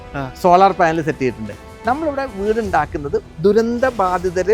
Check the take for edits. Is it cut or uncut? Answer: cut